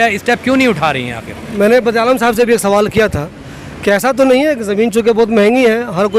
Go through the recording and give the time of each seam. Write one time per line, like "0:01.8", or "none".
none